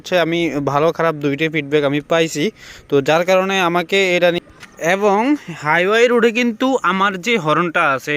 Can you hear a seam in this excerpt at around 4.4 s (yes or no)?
yes